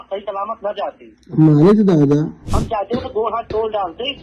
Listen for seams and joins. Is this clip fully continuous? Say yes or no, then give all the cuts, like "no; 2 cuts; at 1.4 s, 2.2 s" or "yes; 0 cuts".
no; 1 cut; at 2.4 s